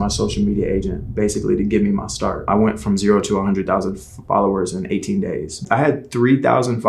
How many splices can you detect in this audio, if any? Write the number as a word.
two